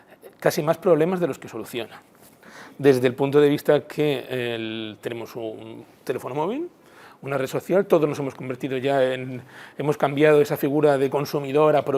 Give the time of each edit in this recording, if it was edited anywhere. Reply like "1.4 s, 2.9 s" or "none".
none

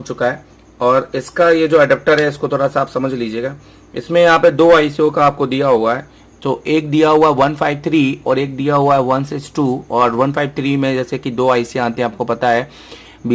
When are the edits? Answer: none

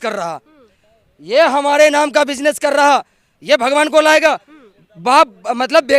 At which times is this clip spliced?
none

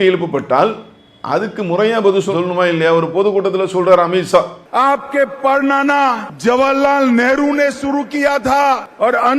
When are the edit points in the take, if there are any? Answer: 4.6 s

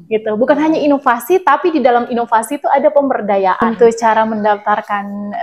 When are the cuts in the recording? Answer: 3.6 s

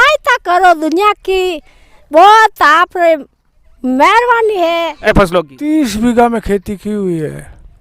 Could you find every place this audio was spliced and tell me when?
5.1 s

